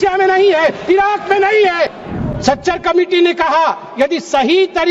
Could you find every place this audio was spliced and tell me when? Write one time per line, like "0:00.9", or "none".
0:02.0